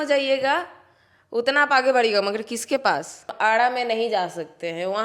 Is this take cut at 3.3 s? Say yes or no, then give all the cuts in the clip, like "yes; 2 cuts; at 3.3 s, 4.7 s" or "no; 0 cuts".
yes; 1 cut; at 3.3 s